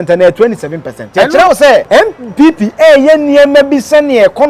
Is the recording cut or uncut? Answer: cut